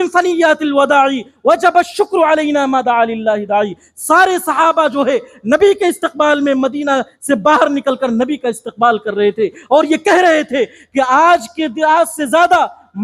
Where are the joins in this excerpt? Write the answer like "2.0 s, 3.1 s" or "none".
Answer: none